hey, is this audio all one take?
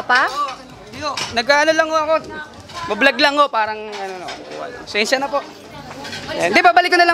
yes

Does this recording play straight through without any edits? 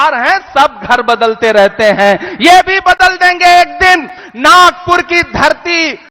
yes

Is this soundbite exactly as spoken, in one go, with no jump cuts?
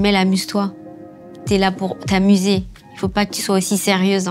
yes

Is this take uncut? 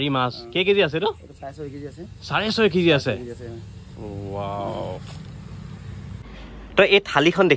no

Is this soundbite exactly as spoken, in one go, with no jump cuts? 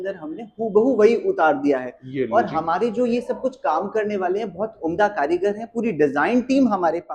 yes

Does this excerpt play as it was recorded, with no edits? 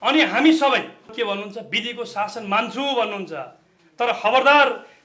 no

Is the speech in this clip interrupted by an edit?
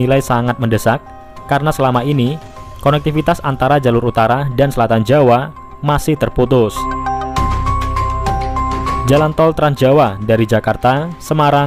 no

